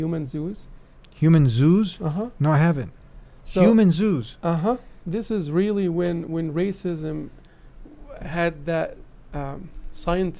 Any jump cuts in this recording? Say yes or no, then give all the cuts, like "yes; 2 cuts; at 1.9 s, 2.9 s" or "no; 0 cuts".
no; 0 cuts